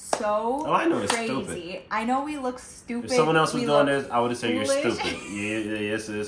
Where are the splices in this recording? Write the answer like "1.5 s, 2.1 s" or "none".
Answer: none